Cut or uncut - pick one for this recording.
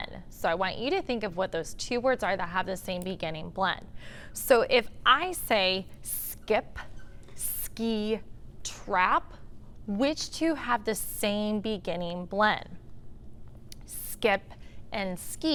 uncut